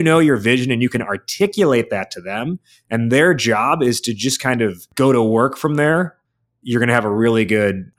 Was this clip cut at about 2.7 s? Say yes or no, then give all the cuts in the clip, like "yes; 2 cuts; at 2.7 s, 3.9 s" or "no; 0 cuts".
no; 2 cuts; at 4.8 s, 6.2 s